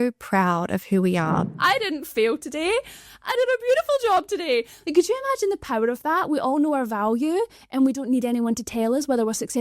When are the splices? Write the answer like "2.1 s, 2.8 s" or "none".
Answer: 1.5 s